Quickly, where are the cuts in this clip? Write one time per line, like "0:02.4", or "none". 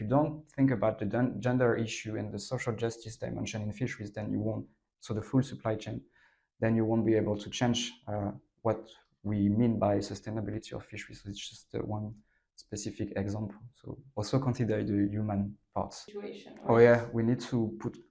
0:16.1